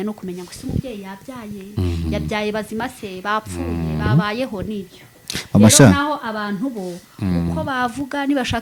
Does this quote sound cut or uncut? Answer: uncut